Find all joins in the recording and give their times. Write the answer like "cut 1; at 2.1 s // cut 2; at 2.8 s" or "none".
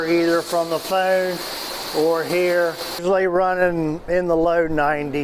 cut 1; at 3.0 s